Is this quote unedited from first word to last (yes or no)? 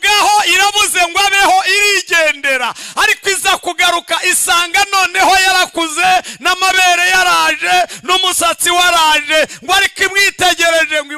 yes